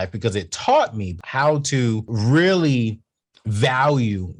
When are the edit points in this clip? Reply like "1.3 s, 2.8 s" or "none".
1.2 s, 2.1 s

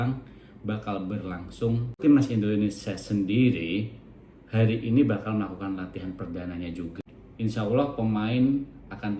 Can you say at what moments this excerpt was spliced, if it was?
2.0 s, 7.0 s

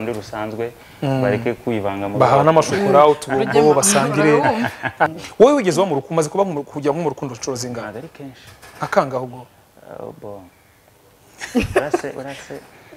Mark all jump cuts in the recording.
5.2 s

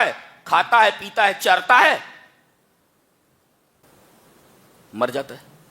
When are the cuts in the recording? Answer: 3.8 s

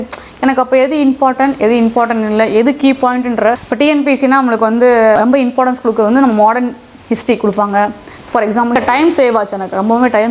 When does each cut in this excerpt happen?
3.6 s, 8.7 s

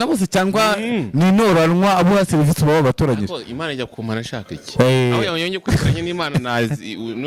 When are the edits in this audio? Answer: none

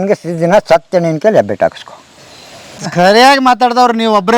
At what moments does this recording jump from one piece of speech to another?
2.8 s

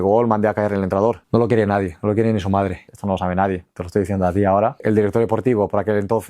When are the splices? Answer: 1.2 s, 2.9 s, 4.8 s

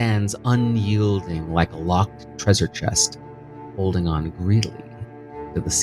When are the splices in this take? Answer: none

